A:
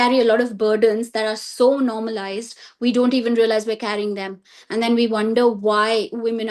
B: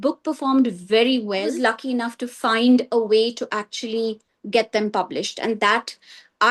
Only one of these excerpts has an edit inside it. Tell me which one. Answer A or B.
B